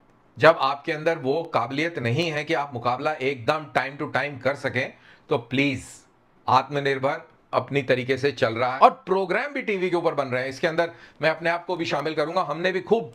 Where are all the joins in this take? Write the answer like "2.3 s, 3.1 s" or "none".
8.7 s